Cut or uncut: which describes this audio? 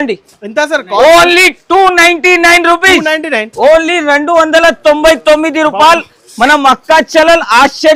uncut